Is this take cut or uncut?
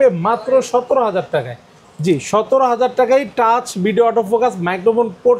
uncut